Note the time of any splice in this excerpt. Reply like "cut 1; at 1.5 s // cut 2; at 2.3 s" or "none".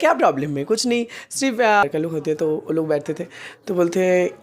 cut 1; at 1.8 s